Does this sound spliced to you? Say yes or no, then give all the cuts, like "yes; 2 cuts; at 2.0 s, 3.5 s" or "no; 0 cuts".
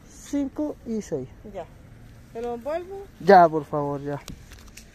no; 0 cuts